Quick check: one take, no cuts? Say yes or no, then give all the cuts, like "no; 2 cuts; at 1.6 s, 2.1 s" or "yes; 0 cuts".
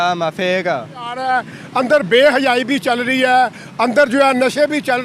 no; 1 cut; at 1.2 s